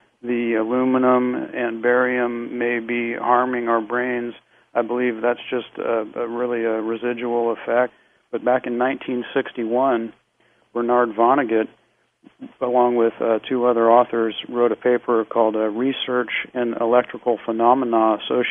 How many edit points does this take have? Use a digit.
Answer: 0